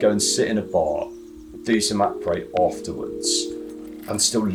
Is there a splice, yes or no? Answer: no